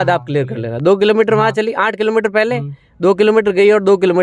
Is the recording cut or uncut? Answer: uncut